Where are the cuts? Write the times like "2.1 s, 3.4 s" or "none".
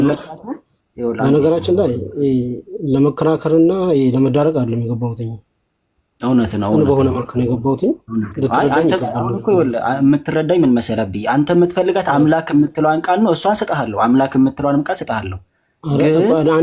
none